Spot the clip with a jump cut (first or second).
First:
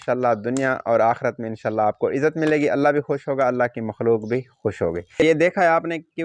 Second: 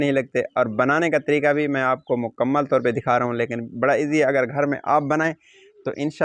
first